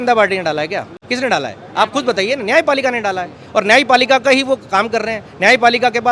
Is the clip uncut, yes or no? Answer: no